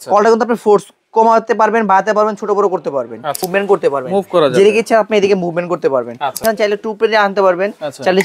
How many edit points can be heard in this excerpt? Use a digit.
2